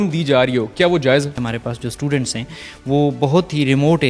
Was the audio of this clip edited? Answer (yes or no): yes